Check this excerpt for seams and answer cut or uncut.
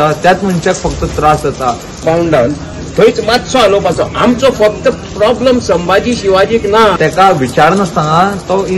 cut